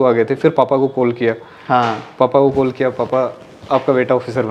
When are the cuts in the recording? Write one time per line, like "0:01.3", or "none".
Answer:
none